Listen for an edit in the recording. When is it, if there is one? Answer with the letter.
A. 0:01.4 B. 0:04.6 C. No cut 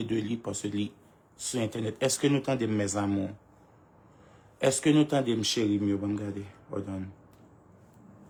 C